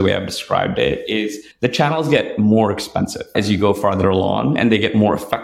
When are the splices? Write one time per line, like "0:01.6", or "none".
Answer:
0:01.4
0:03.3